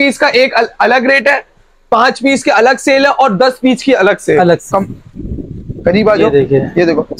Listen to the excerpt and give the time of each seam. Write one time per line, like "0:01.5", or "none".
0:04.7